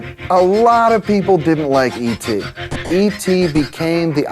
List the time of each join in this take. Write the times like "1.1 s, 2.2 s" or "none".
2.6 s